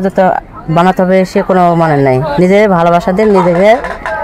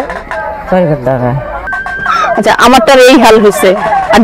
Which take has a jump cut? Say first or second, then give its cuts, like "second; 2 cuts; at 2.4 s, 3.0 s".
second; 1 cut; at 1.8 s